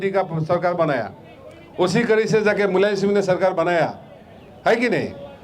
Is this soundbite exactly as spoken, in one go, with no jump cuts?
yes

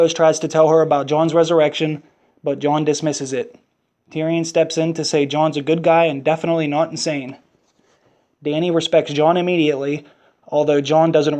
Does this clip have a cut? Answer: no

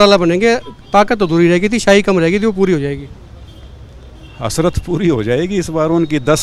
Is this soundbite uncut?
yes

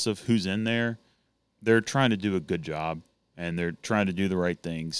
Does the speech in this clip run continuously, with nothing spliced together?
yes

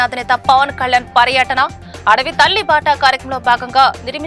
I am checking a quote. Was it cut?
no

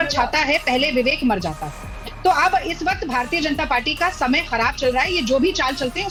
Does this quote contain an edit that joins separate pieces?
no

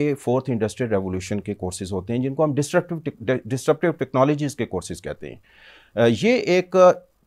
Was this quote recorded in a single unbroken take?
yes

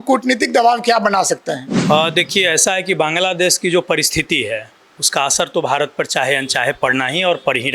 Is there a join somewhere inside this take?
yes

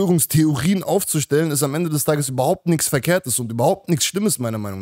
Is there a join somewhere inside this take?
no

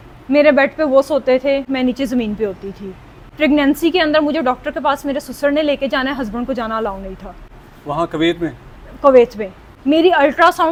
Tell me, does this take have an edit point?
no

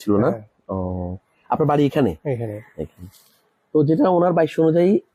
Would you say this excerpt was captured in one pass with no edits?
yes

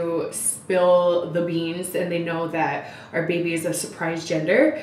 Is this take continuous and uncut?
yes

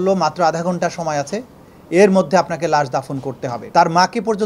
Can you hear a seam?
yes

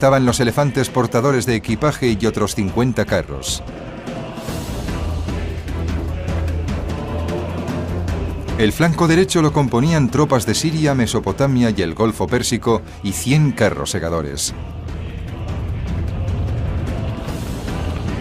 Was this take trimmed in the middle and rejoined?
yes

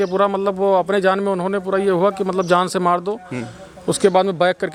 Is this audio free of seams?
yes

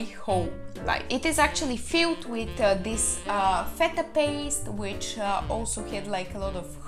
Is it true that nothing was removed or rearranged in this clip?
yes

